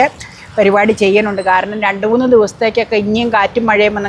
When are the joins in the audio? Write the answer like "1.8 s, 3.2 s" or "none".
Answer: none